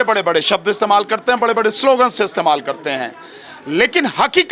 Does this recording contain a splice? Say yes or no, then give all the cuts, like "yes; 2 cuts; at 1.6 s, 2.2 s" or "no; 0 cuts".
no; 0 cuts